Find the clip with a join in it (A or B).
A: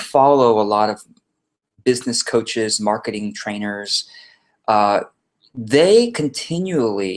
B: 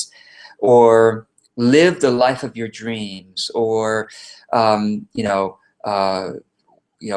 B